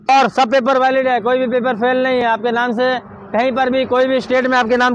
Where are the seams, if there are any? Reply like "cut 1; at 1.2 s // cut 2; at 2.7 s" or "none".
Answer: none